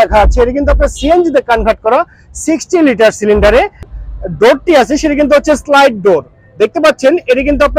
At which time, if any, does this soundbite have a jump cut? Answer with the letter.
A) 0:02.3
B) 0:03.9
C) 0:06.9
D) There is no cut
B